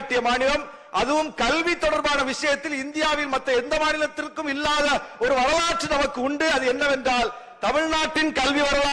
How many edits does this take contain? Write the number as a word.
zero